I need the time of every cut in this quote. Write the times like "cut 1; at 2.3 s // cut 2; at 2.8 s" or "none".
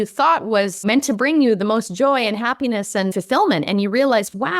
cut 1; at 0.8 s // cut 2; at 3.1 s